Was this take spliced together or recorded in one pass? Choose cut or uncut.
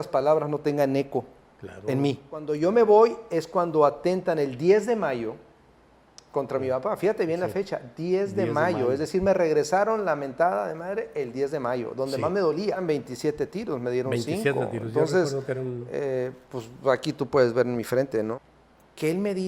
cut